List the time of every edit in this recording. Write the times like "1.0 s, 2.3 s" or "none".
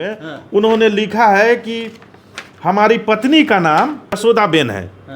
4.2 s